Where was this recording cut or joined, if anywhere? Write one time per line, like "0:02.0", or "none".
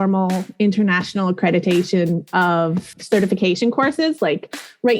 0:03.0